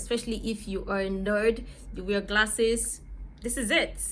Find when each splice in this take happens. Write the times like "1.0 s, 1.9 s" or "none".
none